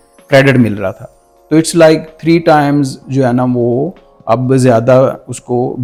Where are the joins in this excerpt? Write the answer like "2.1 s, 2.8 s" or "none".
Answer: none